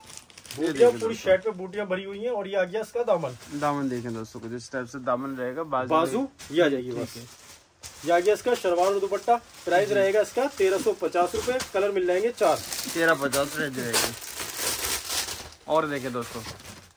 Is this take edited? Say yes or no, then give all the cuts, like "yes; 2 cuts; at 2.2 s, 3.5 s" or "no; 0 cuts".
no; 0 cuts